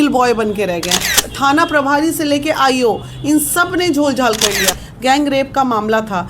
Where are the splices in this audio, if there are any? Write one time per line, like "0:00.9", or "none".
0:01.2
0:04.8